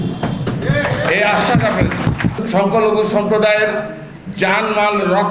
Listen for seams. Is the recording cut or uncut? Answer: cut